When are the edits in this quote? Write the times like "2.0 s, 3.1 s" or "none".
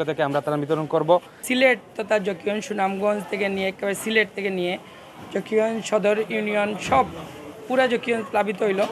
1.4 s